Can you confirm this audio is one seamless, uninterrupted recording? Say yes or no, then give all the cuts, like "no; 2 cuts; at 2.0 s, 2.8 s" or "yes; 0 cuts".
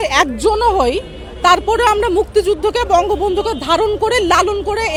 yes; 0 cuts